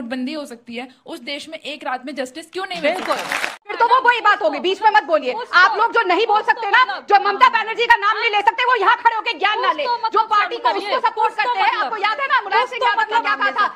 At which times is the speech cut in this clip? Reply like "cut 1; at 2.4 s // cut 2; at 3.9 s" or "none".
cut 1; at 3.7 s